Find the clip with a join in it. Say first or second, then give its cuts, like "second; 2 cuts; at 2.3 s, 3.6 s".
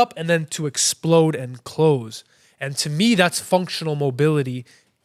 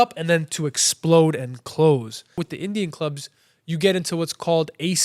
second; 1 cut; at 2.5 s